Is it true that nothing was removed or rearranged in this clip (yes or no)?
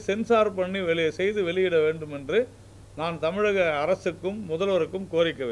yes